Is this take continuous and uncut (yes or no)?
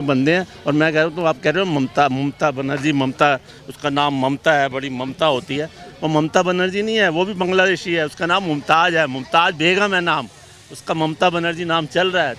yes